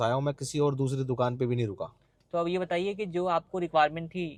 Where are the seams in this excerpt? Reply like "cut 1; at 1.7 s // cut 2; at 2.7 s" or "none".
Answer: none